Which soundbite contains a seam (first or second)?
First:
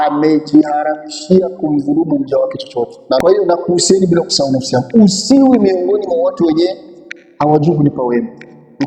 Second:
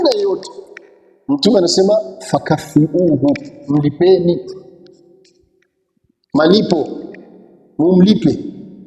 first